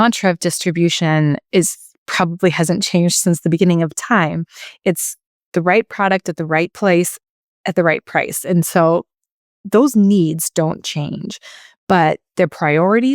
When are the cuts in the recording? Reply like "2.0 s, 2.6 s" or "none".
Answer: 3.5 s, 6.7 s